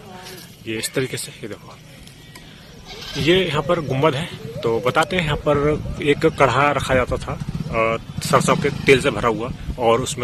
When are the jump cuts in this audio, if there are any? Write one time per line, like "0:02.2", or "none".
none